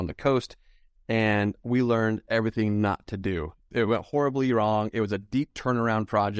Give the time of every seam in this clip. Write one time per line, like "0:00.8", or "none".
0:03.6